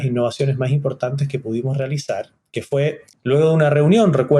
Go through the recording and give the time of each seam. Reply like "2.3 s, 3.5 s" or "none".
3.1 s